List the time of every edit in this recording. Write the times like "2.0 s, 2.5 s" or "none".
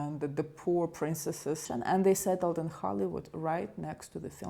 1.6 s